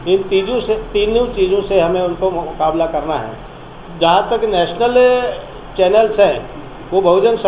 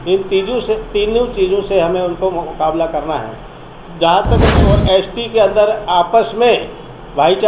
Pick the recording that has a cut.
second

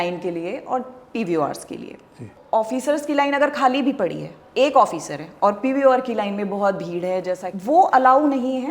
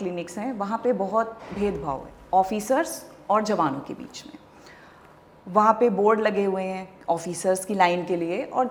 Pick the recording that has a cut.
first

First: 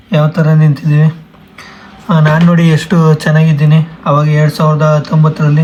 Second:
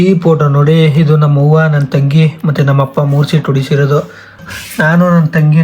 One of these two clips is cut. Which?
second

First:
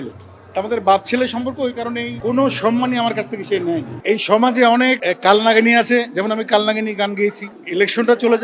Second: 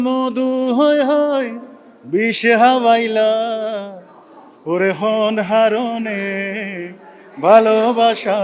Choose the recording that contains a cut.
first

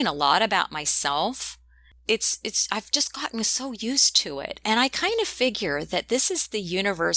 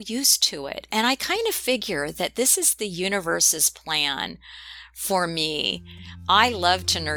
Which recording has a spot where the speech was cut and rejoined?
first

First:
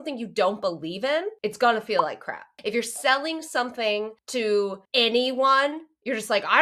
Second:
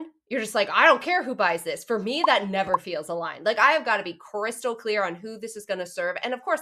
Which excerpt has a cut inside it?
first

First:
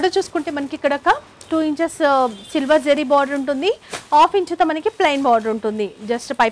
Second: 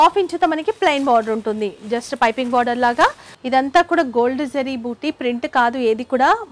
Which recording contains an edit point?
second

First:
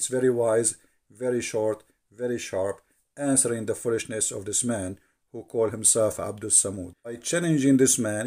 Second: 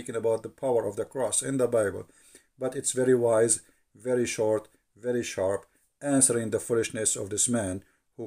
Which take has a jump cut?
first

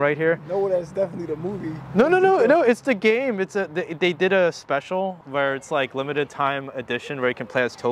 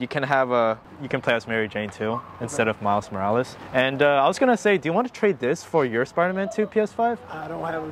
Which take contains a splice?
first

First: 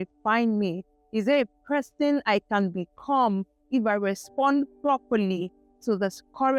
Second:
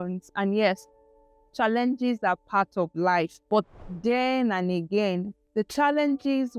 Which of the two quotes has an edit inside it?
second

